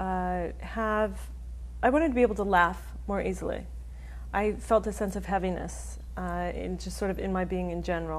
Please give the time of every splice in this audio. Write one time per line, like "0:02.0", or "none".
0:07.1